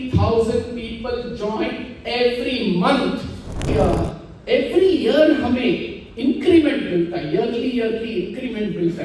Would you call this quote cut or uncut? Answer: cut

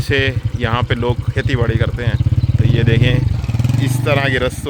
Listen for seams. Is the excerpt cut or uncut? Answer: cut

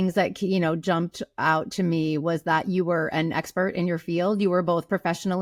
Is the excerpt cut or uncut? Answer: uncut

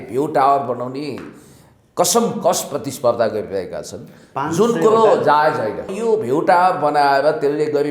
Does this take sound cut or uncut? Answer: cut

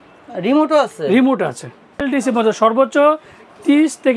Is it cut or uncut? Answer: cut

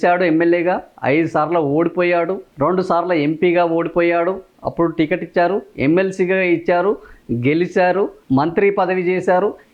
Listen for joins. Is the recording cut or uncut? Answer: uncut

